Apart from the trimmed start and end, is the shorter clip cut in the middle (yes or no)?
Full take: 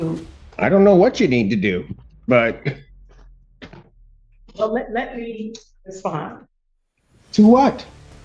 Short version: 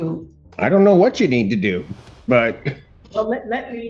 yes